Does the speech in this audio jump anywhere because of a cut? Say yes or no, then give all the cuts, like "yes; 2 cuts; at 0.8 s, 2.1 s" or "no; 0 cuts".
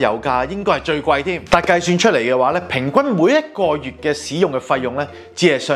no; 0 cuts